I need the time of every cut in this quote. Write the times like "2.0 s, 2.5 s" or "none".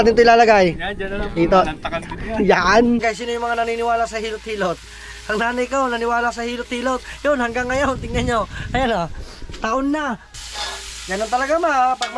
3.0 s, 10.3 s